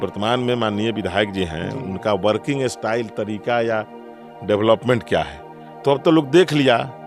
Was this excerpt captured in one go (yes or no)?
yes